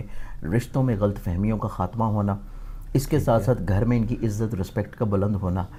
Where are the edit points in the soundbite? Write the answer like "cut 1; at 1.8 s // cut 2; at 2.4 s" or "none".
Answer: none